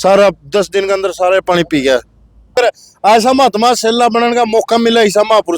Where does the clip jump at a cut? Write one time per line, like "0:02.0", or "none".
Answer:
0:02.5